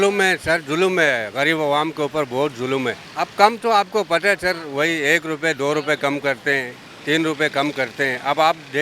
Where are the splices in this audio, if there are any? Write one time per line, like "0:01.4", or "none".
none

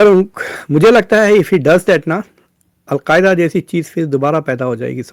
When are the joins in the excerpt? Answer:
none

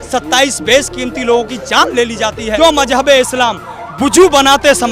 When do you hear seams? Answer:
0:02.6

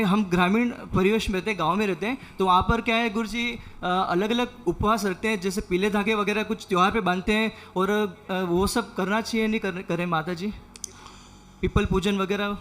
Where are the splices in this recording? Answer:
none

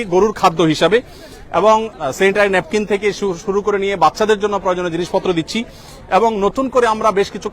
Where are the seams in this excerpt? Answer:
none

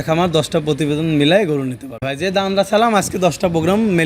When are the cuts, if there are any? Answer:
0:02.1

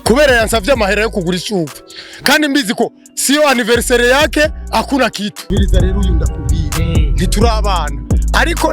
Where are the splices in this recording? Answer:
0:05.5

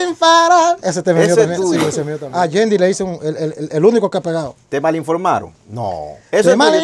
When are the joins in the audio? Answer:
0:02.2

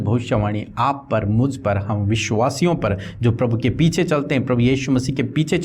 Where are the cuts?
none

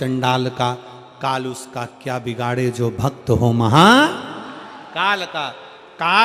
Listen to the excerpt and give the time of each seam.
none

